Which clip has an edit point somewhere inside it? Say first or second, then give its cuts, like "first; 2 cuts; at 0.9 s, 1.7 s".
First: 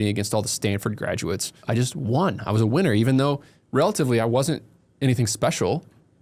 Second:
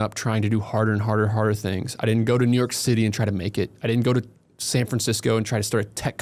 first; 1 cut; at 1.5 s